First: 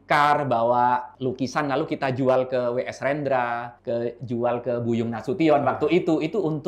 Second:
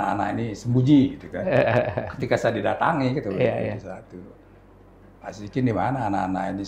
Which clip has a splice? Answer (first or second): first